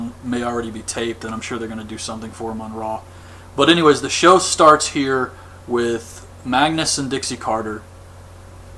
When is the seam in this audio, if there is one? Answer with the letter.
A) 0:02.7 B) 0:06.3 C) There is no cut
A